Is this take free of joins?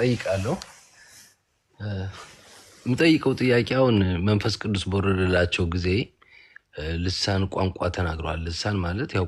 yes; 0 cuts

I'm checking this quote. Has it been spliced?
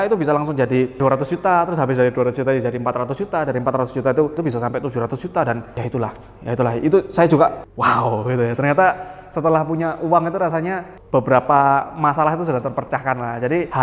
yes; 4 cuts; at 1.0 s, 4.4 s, 7.6 s, 10.9 s

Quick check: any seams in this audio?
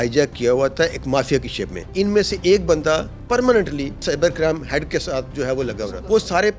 no; 0 cuts

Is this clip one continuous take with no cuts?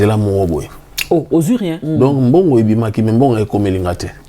no; 1 cut; at 1.8 s

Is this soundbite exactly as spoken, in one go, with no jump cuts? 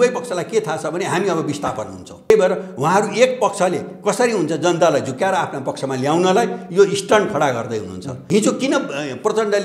no; 2 cuts; at 2.3 s, 8.2 s

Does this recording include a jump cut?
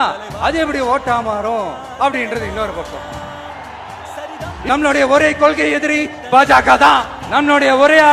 yes; 1 cut; at 4.5 s

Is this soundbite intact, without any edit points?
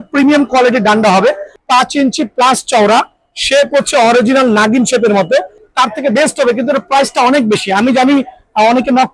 no; 2 cuts; at 1.5 s, 5.6 s

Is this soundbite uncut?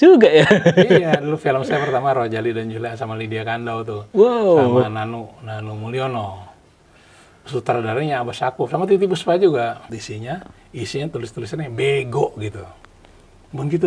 no; 1 cut; at 9.8 s

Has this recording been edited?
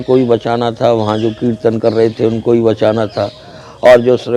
no; 0 cuts

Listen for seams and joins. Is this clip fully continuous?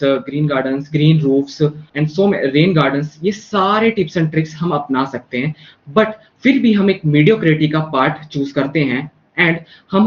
no; 1 cut; at 1.8 s

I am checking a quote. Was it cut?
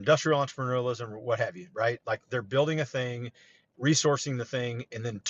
no; 0 cuts

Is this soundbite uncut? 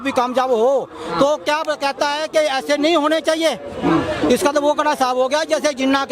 yes; 0 cuts

